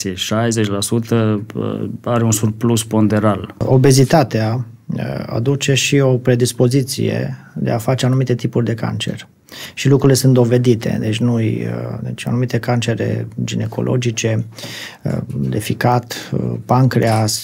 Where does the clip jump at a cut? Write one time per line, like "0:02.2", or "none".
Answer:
0:03.6